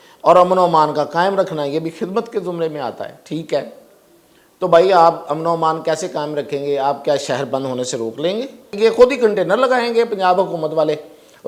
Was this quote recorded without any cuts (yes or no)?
no